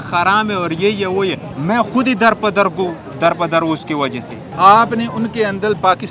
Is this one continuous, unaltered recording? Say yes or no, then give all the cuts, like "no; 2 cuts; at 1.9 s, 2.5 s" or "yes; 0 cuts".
no; 2 cuts; at 1.5 s, 4.4 s